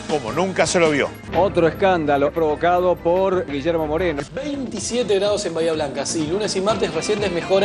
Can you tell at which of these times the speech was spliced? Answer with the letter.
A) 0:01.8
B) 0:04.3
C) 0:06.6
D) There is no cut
B